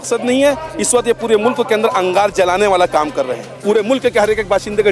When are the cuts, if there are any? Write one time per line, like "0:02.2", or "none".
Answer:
0:03.5